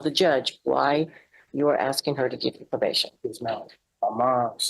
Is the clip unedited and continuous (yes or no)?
no